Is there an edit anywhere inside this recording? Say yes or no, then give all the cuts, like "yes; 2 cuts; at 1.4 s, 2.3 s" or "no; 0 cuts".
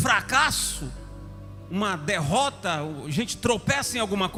no; 0 cuts